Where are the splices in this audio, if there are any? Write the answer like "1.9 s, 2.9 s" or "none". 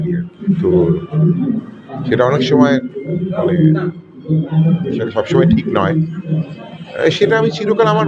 none